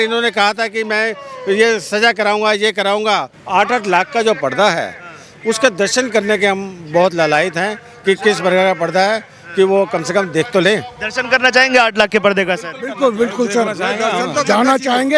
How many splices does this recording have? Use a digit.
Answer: 1